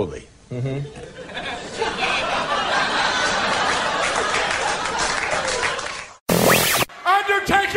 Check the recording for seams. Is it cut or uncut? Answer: cut